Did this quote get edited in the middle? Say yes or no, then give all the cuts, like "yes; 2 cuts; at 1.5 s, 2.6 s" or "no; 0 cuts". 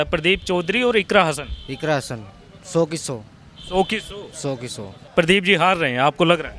yes; 1 cut; at 5.0 s